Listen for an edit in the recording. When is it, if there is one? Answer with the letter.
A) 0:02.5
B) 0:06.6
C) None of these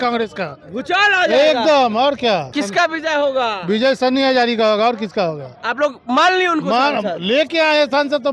A